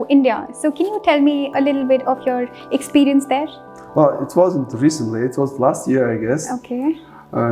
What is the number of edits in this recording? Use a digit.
0